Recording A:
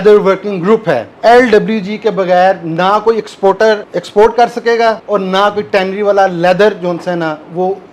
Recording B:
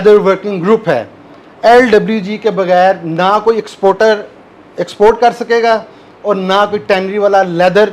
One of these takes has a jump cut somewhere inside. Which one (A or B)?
A